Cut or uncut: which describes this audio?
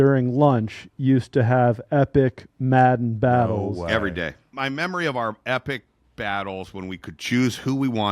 cut